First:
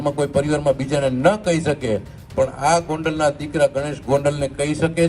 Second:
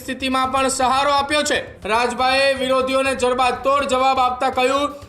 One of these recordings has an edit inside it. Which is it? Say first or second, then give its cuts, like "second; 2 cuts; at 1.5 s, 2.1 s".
second; 1 cut; at 1.7 s